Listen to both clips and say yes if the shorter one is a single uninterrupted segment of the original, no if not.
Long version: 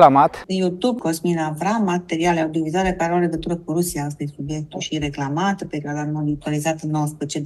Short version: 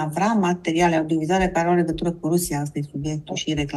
yes